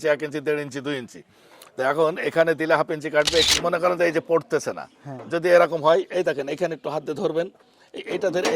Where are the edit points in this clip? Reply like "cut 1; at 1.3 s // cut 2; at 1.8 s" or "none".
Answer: cut 1; at 3.5 s